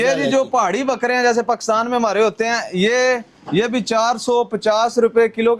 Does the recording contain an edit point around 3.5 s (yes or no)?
no